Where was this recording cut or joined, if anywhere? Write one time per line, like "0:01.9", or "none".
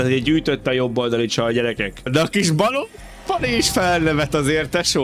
0:02.1